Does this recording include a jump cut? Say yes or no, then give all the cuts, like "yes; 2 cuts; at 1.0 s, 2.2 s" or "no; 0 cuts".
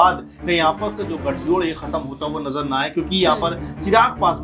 no; 0 cuts